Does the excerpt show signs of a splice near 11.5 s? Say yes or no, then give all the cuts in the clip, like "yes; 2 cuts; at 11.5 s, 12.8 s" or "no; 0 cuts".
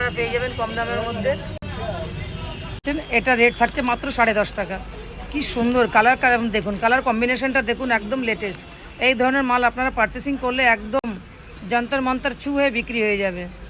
no; 0 cuts